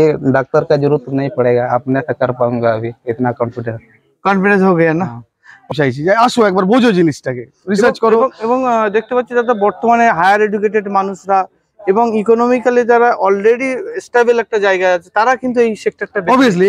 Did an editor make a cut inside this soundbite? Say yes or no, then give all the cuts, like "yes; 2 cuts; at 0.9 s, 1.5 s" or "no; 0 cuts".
yes; 1 cut; at 5.7 s